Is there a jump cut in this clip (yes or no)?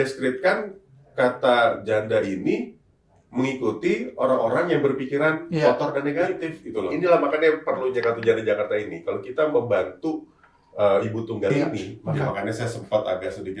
yes